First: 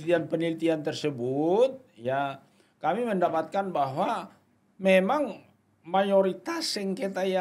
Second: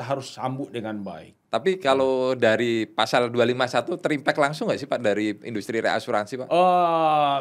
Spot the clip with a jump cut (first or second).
second